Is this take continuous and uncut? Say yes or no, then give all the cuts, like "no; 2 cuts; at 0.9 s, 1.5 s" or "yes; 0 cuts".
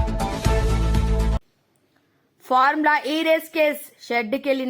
no; 1 cut; at 1.5 s